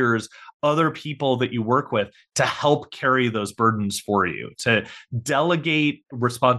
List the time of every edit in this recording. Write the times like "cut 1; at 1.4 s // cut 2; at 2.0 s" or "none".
none